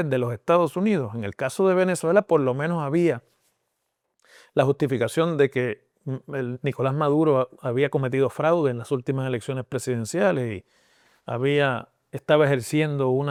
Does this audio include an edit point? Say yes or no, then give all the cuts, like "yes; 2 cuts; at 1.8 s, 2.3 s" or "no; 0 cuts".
no; 0 cuts